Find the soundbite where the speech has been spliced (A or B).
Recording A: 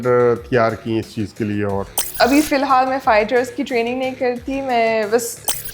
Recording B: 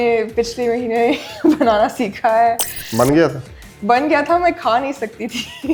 A